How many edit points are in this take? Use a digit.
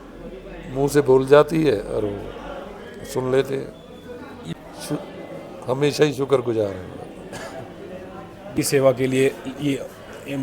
2